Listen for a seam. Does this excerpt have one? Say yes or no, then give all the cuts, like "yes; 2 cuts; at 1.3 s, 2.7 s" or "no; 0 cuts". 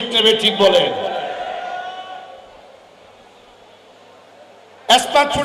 no; 0 cuts